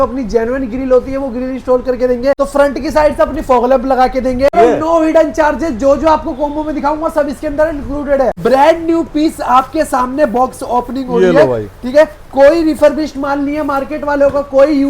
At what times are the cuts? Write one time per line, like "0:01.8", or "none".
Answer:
0:02.4
0:04.5
0:08.4